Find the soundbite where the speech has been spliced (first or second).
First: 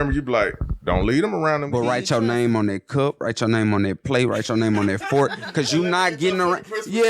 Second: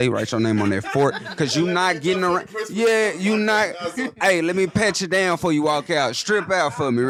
first